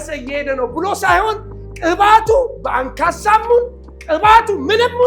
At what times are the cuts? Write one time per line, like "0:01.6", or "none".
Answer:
none